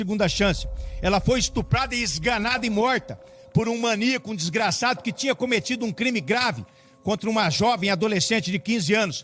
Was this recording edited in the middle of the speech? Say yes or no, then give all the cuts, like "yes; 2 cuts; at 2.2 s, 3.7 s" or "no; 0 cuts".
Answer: no; 0 cuts